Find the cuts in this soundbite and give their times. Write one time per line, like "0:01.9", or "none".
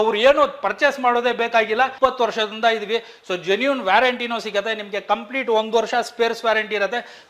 0:01.9